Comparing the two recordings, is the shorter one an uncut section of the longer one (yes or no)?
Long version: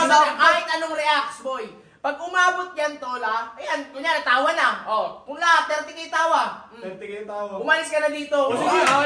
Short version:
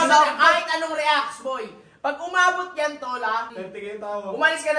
no